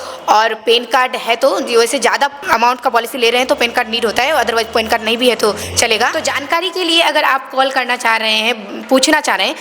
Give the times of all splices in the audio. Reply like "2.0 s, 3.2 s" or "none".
2.4 s, 6.3 s